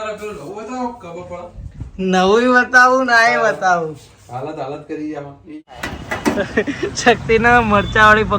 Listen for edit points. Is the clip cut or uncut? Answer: cut